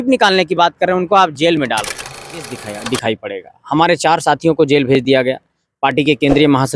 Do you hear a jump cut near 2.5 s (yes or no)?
yes